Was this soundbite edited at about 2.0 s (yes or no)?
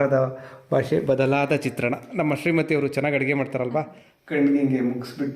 no